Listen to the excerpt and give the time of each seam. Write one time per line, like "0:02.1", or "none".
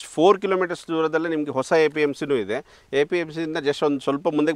none